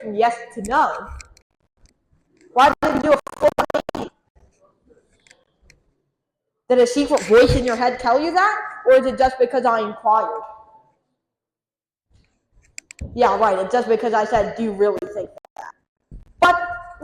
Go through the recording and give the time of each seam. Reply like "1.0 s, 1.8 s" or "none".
none